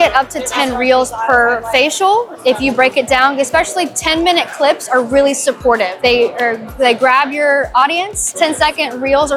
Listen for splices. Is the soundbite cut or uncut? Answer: uncut